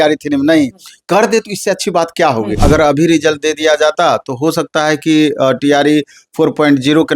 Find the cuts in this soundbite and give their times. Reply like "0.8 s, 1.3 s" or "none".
2.6 s